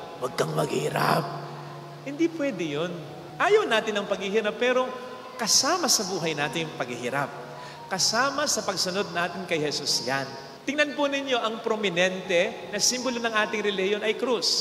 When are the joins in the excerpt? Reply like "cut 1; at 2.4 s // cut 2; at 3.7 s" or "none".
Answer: none